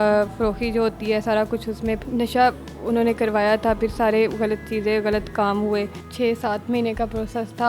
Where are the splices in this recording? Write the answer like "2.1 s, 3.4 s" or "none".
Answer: 2.0 s, 6.0 s

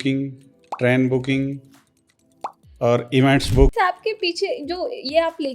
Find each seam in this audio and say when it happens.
3.7 s

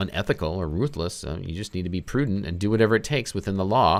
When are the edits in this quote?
none

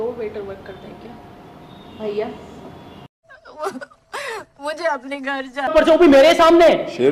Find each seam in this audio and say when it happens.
5.7 s

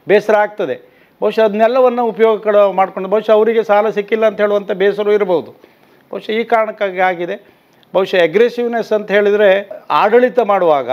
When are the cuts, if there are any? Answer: 9.8 s

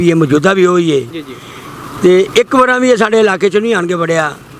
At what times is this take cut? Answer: none

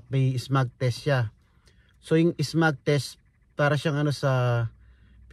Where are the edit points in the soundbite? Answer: none

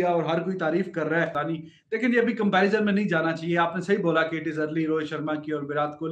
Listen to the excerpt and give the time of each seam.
1.3 s

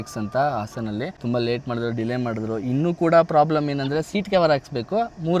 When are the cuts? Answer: 1.1 s

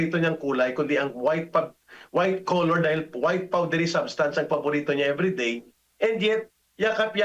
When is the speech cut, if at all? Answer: none

